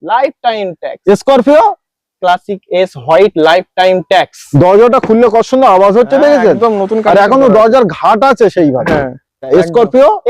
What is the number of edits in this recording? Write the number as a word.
two